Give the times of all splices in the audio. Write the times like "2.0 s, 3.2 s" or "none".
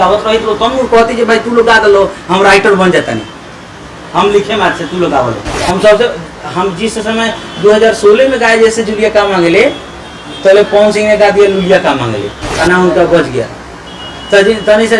5.5 s, 12.6 s